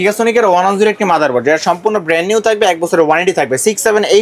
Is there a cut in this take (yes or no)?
no